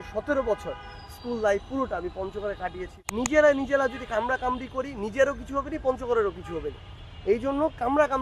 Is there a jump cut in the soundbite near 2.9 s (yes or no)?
yes